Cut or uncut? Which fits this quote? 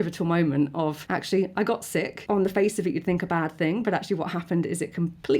cut